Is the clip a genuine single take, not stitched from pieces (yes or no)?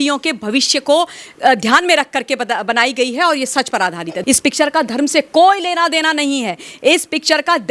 no